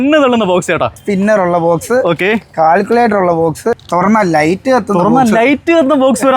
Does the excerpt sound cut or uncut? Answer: cut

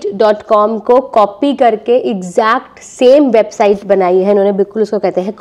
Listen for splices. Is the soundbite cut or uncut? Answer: uncut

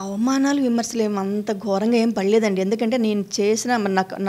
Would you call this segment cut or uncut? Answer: uncut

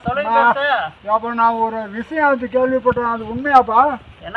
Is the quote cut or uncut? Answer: uncut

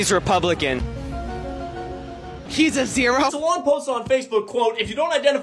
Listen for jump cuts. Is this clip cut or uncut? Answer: cut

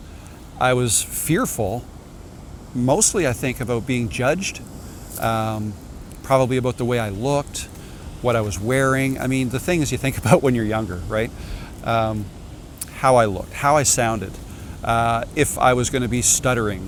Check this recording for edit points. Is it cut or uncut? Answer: uncut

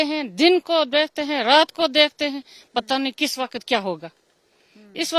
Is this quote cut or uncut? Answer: uncut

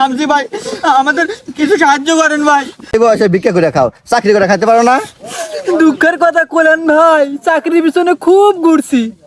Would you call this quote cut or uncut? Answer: cut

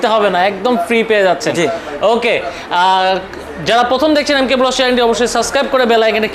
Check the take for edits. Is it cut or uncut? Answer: uncut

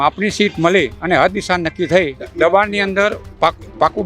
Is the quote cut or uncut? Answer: cut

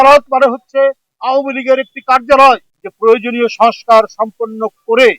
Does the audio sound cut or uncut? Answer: cut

